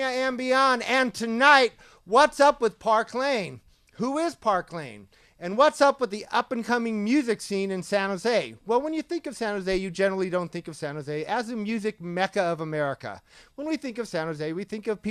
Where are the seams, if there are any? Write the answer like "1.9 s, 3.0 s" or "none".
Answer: 4.7 s